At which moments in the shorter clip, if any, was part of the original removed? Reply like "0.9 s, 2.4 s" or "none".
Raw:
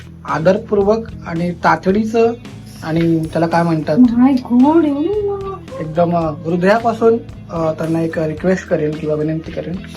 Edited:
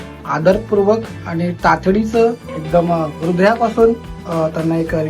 2.5 s